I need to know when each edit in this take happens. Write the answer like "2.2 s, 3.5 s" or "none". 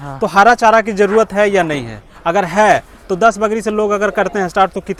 none